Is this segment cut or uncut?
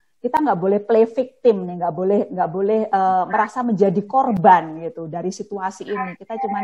uncut